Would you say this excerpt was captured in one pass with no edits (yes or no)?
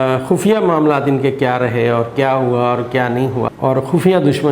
no